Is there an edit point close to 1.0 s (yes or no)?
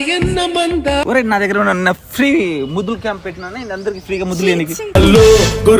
yes